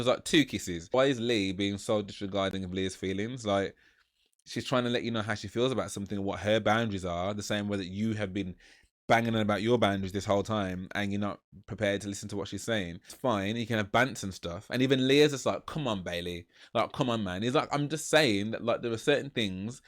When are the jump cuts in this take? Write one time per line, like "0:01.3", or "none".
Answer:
0:00.9
0:13.0